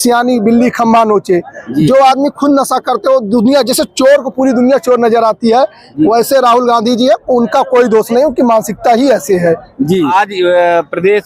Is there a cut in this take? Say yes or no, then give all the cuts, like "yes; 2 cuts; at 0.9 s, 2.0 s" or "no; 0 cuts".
yes; 1 cut; at 10.1 s